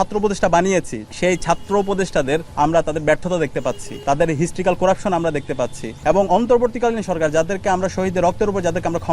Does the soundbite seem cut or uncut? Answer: cut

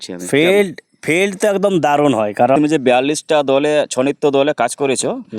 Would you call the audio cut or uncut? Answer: cut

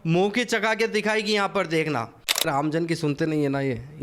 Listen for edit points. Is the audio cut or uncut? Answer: cut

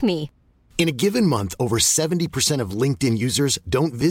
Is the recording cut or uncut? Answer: uncut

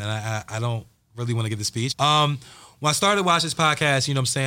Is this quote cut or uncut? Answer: cut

